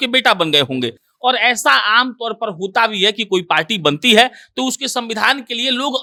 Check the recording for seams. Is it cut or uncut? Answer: uncut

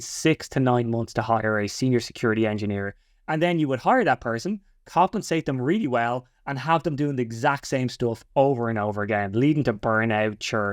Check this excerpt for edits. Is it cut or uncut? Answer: uncut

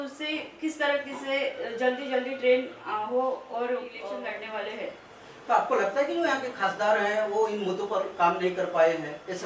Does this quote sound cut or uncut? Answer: cut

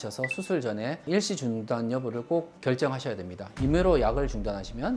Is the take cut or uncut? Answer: uncut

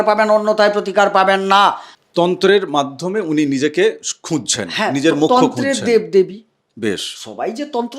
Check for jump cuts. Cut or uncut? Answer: cut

